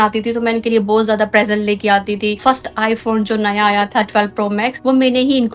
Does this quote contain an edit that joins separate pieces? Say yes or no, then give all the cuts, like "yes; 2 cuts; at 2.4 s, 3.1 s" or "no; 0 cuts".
yes; 2 cuts; at 2.4 s, 4.7 s